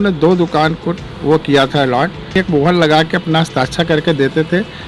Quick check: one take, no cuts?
no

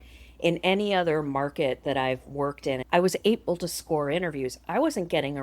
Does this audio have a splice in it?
yes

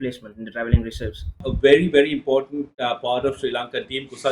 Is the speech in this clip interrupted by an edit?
yes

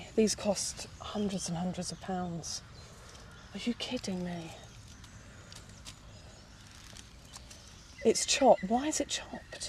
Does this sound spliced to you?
no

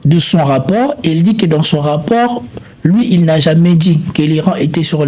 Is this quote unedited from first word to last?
yes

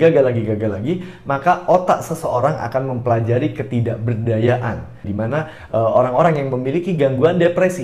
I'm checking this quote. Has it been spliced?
yes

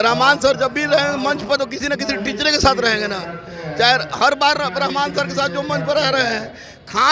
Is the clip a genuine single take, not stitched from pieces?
yes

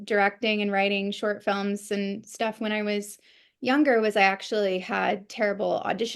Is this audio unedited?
yes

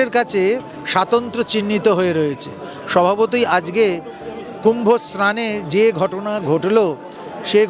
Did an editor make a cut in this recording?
no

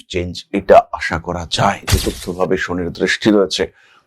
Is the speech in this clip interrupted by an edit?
yes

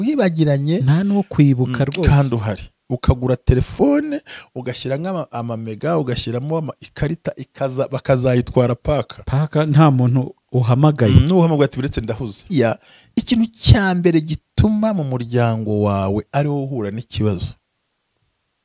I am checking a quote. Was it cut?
yes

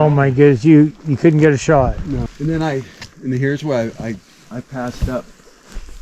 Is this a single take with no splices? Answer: no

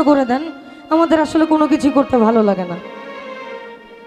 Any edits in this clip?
no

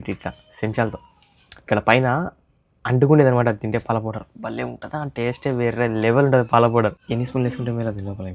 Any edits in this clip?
yes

